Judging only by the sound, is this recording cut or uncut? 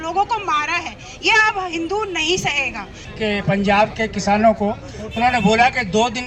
cut